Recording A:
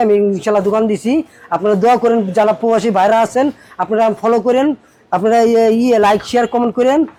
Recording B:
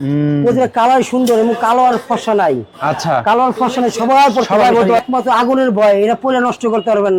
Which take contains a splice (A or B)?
B